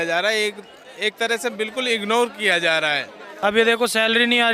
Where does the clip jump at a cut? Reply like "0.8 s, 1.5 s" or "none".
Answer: 3.2 s